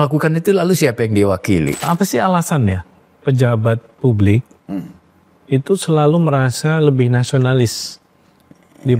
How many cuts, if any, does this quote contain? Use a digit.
1